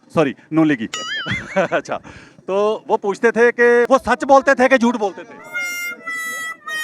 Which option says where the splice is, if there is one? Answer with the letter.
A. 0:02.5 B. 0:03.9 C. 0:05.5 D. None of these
B